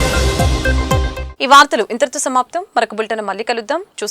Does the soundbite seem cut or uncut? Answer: uncut